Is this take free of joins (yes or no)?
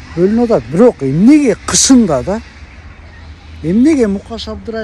yes